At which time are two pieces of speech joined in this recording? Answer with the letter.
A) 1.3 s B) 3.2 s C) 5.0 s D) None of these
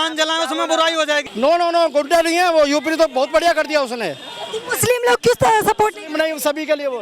A